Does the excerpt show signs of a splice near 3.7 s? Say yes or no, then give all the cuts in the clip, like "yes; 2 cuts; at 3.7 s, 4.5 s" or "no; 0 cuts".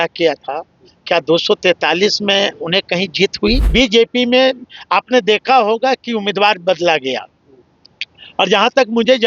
yes; 1 cut; at 3.7 s